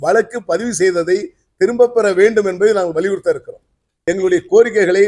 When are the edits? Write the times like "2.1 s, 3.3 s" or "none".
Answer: 3.9 s